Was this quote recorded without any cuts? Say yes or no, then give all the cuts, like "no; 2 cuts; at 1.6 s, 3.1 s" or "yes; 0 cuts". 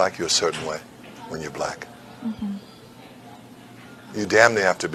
yes; 0 cuts